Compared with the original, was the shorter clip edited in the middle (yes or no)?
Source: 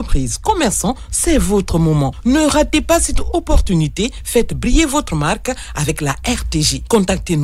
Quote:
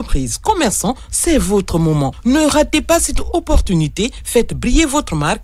no